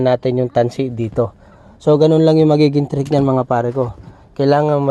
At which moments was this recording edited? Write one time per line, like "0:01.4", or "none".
none

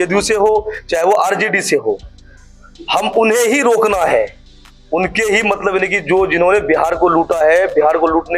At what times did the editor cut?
none

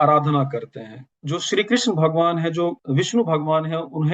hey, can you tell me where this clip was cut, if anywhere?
0:01.1
0:02.8

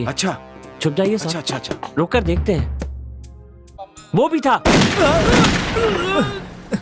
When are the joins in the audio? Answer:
none

